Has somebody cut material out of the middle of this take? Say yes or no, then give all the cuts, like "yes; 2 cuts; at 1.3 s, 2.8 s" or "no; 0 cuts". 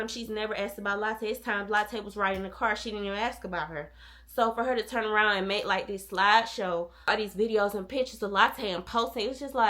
yes; 1 cut; at 7.1 s